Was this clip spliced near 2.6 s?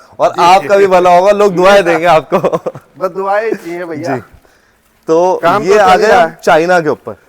no; 0 cuts

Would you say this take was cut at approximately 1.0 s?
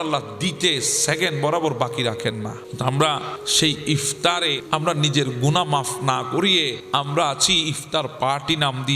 no; 4 cuts; at 2.6 s, 3.4 s, 4.6 s, 6.8 s

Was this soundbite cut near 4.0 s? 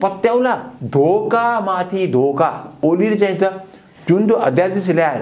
no; 1 cut; at 2.8 s

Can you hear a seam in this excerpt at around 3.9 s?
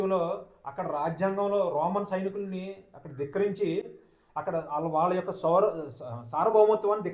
no; 0 cuts

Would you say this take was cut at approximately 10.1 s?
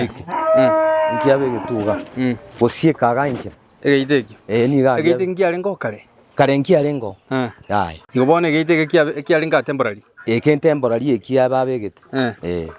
no; 1 cut; at 8.0 s

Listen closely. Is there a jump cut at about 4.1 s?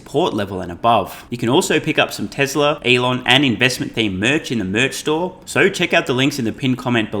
no; 3 cuts; at 1.2 s, 2.8 s, 5.4 s

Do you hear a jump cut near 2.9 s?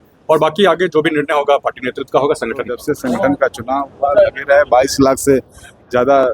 yes; 1 cut; at 2.9 s

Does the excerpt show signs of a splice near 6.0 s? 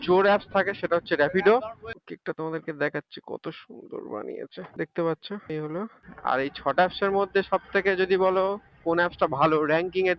yes; 2 cuts; at 1.8 s, 6.0 s

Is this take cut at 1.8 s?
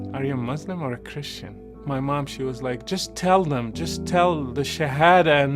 yes; 1 cut; at 1.8 s

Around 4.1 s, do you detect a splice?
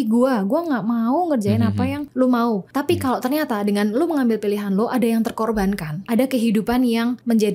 no; 3 cuts; at 2.0 s, 2.7 s, 5.9 s

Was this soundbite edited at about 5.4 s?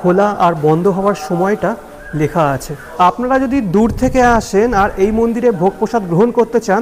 no; 1 cut; at 2.8 s

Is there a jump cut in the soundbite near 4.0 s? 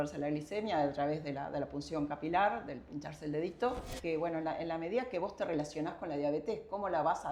yes; 1 cut; at 4.0 s

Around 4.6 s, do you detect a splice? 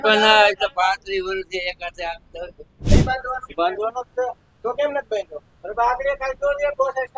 no; 1 cut; at 2.8 s

